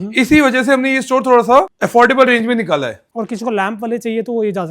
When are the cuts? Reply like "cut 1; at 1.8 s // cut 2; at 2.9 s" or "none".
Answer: cut 1; at 1.7 s // cut 2; at 3.0 s